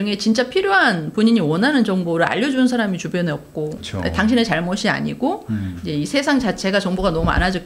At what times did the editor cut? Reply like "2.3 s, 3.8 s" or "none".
3.8 s